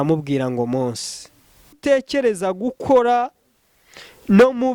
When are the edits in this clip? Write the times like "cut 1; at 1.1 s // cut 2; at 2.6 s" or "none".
cut 1; at 1.8 s